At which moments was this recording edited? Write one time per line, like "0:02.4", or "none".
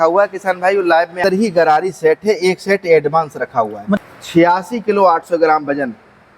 0:01.2
0:04.0